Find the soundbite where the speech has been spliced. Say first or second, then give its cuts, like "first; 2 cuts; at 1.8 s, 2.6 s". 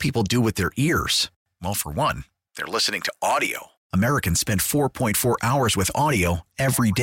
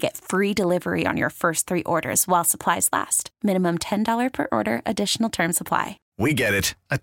second; 1 cut; at 6.0 s